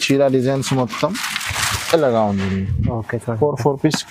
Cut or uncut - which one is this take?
uncut